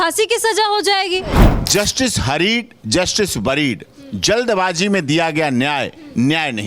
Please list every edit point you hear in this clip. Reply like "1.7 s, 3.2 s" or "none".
1.5 s